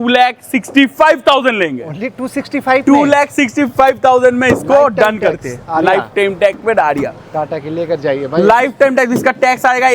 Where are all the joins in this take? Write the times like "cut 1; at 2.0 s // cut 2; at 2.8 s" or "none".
none